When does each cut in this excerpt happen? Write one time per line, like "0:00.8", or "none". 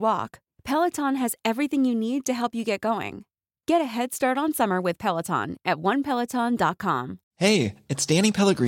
0:07.2